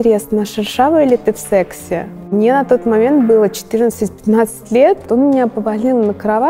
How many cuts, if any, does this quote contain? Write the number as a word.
two